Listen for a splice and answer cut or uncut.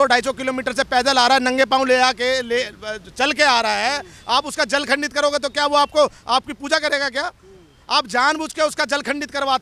uncut